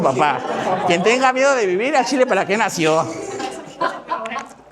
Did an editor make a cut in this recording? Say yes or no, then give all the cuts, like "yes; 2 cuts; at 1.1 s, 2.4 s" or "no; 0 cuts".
no; 0 cuts